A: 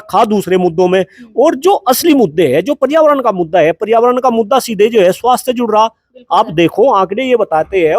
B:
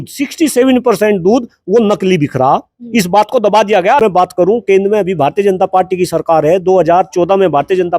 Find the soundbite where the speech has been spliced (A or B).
B